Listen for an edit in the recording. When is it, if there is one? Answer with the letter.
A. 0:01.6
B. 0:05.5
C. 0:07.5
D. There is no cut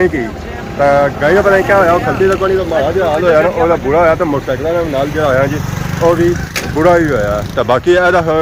D